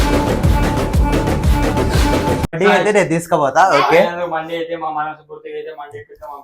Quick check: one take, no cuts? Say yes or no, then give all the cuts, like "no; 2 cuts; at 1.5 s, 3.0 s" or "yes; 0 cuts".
no; 1 cut; at 2.5 s